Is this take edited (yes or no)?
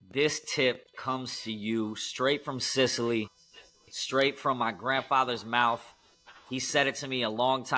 no